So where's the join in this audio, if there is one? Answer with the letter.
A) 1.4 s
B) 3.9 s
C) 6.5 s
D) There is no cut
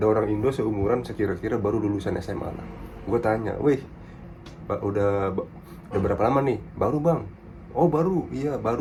D